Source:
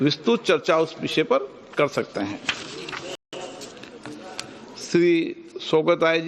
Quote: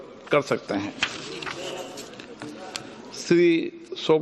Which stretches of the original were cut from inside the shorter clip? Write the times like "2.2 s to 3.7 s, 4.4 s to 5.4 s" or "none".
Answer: 3.2 s to 3.3 s